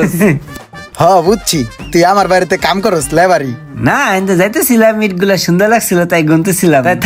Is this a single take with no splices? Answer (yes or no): yes